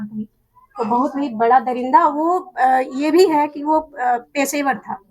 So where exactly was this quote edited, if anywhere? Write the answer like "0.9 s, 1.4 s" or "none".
none